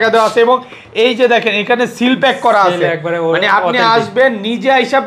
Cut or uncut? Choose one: uncut